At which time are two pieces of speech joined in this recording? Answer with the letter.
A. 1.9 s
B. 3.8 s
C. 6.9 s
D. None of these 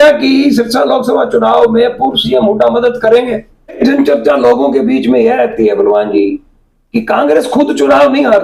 B